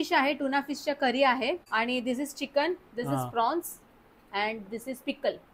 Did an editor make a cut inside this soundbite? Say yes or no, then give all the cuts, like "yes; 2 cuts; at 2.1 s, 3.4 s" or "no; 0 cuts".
yes; 1 cut; at 1.6 s